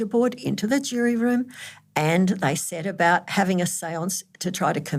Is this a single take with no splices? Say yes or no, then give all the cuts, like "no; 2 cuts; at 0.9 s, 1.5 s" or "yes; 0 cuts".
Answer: yes; 0 cuts